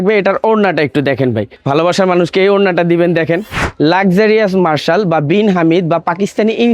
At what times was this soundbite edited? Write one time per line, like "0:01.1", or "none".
0:01.5
0:03.7

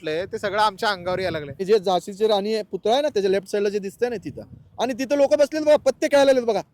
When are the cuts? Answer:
0:01.6

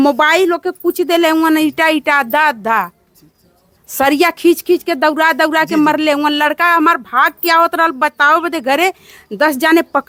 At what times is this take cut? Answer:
none

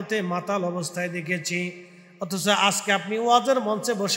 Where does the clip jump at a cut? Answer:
none

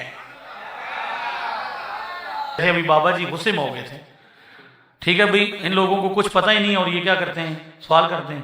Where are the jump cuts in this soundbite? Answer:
0:02.6

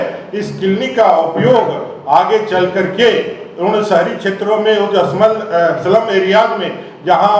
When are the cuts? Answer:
none

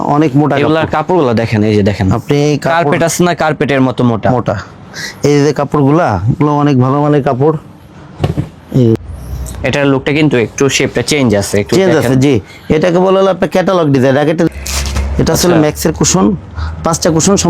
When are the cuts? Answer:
0:09.0
0:14.5

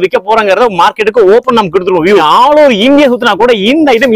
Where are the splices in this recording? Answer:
0:02.2

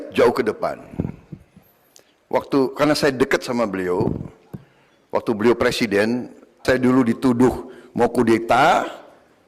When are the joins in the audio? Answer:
0:06.6

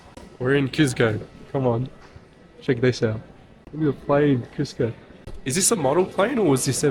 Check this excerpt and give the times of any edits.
none

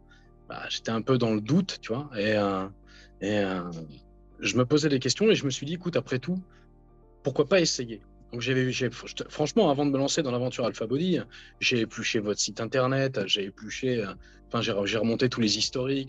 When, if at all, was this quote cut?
none

